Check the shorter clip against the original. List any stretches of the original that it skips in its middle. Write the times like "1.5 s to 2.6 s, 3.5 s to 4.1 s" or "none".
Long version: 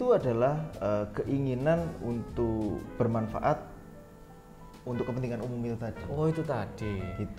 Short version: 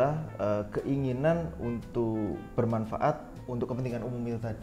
3.7 s to 4.7 s